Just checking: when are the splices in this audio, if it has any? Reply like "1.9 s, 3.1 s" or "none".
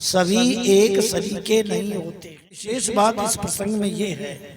2.6 s